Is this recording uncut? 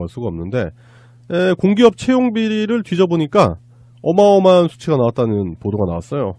yes; 0 cuts

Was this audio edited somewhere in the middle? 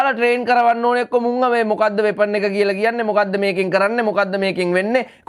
no; 0 cuts

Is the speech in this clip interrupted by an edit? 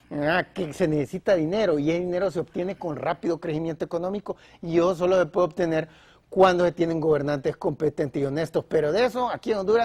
no; 0 cuts

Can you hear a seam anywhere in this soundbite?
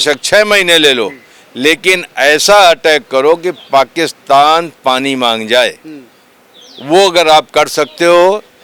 no; 0 cuts

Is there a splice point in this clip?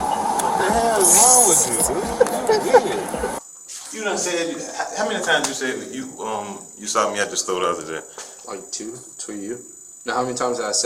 yes; 1 cut; at 3.3 s

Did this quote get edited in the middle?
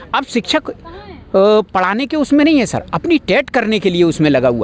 no; 0 cuts

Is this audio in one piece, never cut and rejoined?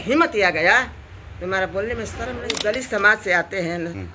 no; 1 cut; at 2.4 s

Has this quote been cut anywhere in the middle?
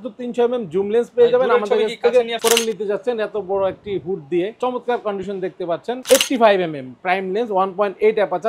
yes; 3 cuts; at 2.4 s, 4.6 s, 6.0 s

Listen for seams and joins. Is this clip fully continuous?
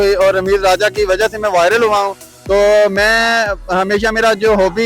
yes; 0 cuts

